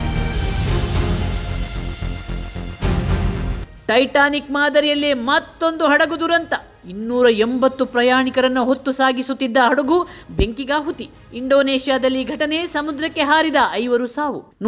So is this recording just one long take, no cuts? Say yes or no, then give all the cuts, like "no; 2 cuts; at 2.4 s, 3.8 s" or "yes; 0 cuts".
no; 1 cut; at 3.7 s